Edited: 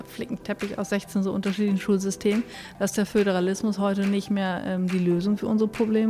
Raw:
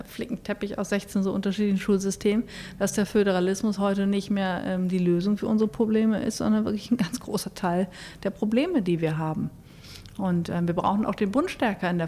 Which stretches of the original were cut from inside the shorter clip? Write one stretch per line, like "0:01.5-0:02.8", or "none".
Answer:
none